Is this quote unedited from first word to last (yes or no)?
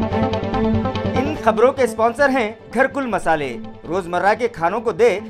yes